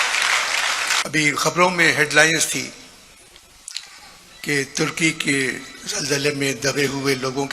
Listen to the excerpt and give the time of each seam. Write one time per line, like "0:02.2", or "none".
0:01.0